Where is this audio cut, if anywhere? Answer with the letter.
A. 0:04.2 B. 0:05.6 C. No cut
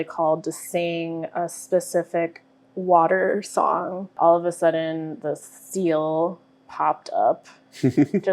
A